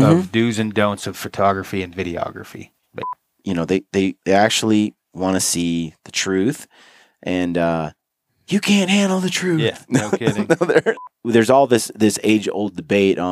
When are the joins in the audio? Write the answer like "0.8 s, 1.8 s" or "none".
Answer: 3.2 s, 11.0 s